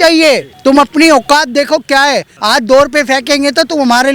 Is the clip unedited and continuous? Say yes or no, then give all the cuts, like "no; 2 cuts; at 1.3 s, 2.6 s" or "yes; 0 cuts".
no; 1 cut; at 2.3 s